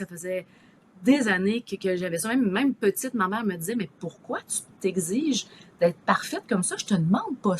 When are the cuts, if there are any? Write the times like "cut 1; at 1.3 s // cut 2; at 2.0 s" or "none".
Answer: none

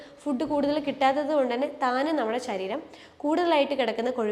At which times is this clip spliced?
none

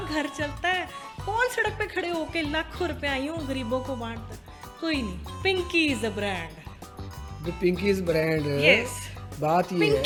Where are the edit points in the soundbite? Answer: none

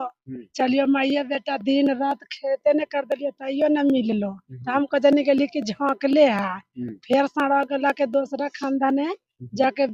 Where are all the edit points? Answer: none

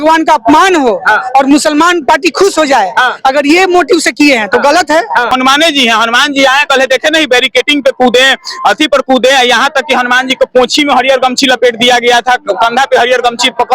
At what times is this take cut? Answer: cut 1; at 5.3 s

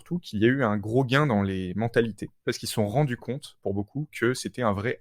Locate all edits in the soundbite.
cut 1; at 2.6 s

